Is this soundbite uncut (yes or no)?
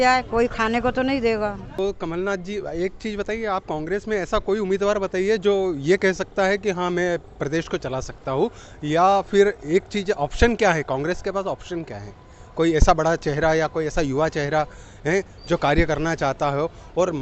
no